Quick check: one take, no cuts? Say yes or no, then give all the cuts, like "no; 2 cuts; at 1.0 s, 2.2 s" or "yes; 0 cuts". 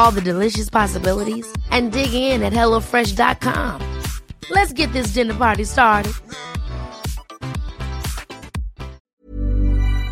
no; 1 cut; at 9.0 s